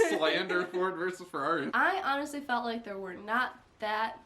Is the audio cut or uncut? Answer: cut